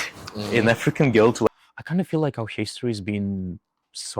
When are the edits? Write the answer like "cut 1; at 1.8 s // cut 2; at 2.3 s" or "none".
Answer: cut 1; at 1.5 s